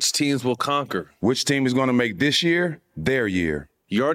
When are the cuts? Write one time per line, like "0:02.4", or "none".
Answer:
0:01.1